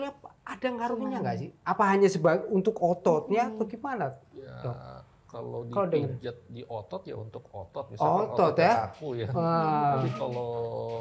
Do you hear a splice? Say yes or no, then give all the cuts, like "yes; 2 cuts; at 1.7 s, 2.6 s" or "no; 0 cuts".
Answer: no; 0 cuts